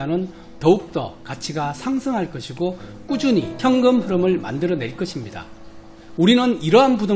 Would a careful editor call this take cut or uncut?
cut